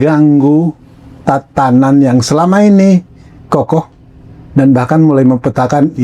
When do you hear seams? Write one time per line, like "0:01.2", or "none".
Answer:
0:03.4